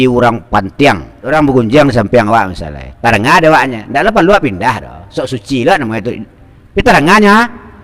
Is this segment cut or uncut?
cut